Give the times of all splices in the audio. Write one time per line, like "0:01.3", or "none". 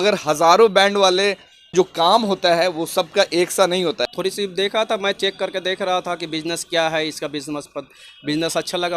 0:01.7
0:04.0

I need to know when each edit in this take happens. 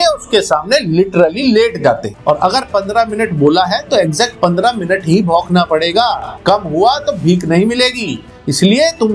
0:02.1

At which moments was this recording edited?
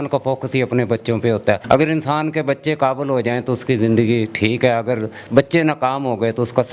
0:01.6

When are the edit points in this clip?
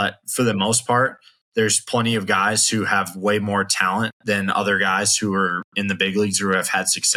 none

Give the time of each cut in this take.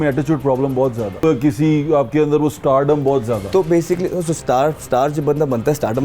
0:01.1

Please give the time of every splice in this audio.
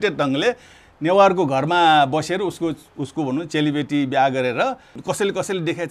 0:05.0

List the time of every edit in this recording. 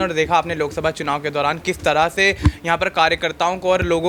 none

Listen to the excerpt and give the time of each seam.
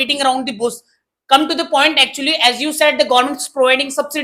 none

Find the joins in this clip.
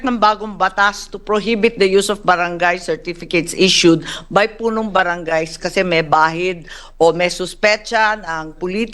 none

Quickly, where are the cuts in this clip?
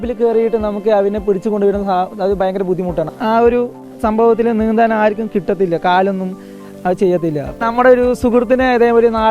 0:03.1
0:07.6

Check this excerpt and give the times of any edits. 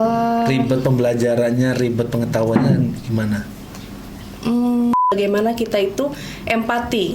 0:05.0

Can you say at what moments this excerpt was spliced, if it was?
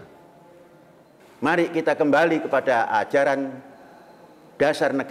0:01.2

